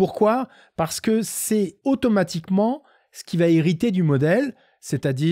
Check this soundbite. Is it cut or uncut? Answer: cut